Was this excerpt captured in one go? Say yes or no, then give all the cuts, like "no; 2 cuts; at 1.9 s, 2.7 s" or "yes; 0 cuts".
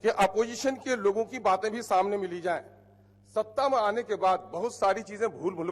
yes; 0 cuts